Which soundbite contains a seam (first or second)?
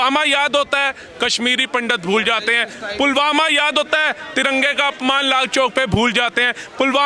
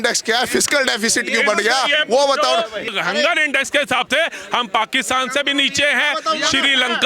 second